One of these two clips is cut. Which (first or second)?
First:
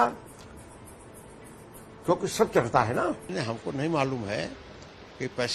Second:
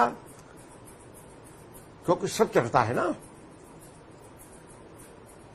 first